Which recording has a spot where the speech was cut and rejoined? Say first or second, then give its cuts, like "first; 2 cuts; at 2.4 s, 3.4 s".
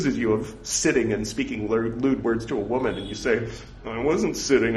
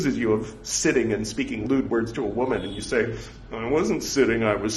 second; 1 cut; at 1.6 s